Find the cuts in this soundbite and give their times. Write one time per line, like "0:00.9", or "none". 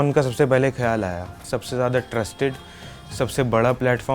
0:01.4